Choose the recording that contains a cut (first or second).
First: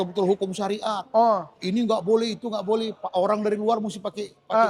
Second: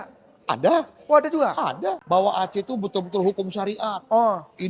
second